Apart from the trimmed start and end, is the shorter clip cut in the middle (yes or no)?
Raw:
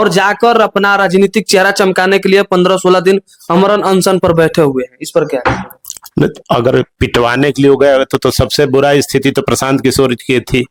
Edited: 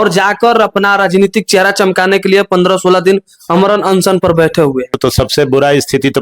yes